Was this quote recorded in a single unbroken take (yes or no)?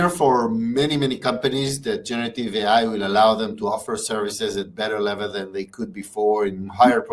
yes